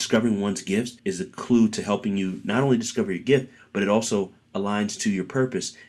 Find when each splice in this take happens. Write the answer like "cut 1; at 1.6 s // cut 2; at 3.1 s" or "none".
cut 1; at 1.0 s